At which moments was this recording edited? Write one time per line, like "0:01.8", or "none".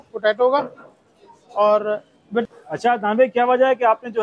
0:02.4

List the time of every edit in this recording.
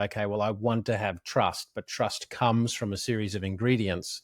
0:01.8

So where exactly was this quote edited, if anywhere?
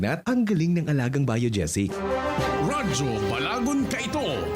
0:01.9

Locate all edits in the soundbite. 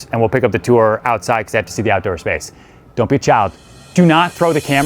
0:03.9

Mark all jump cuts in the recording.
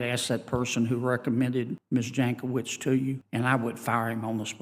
0:01.8
0:03.2

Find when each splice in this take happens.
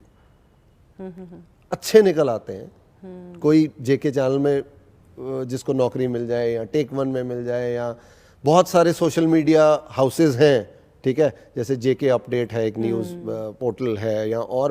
none

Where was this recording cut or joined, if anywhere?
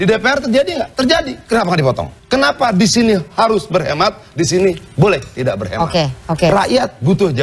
0:02.1

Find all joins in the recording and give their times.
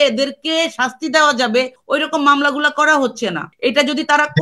0:01.8
0:03.5

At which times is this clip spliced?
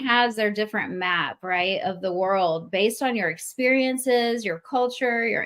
none

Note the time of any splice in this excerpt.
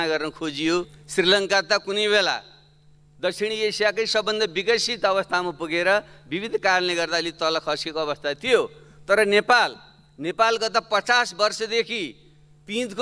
0:01.0

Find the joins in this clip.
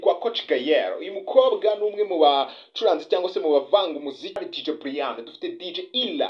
0:04.4

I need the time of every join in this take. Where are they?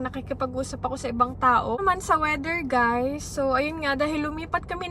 0:01.8

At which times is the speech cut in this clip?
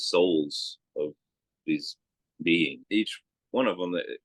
0:02.8

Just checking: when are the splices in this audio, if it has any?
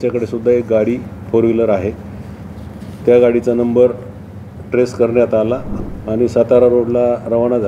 0:05.7

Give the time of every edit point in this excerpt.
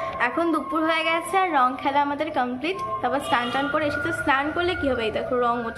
none

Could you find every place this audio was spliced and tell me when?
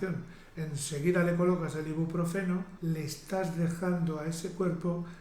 0:02.7

